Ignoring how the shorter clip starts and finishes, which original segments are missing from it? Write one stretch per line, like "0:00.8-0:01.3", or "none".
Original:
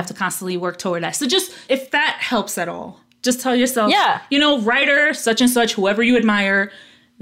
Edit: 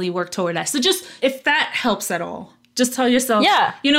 none